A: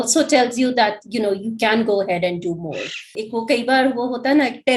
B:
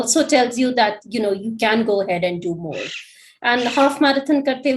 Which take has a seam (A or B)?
A